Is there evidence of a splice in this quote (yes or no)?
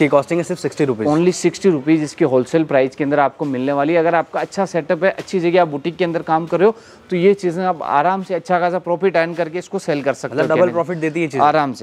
no